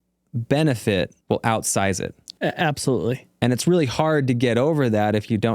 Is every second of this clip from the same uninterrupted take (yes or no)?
no